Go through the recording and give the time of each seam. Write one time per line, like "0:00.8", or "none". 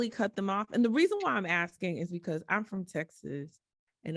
none